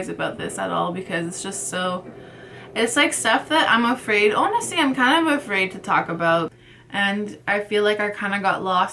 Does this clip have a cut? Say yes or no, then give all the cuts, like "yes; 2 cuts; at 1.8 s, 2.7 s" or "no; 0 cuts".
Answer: yes; 1 cut; at 6.6 s